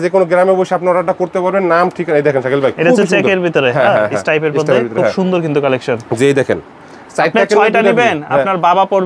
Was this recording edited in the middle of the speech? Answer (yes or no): no